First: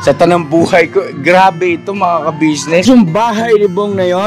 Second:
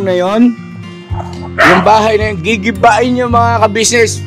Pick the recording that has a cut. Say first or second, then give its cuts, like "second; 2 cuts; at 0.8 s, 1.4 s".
first; 1 cut; at 2.8 s